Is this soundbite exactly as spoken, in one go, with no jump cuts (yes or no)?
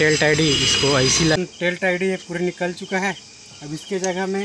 no